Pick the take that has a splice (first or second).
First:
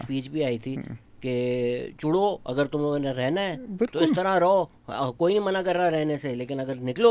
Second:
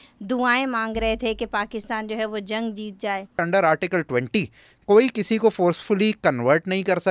second